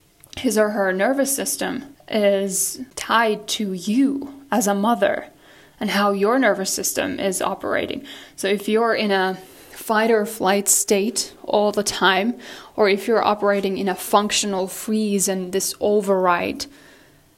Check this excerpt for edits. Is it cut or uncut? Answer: cut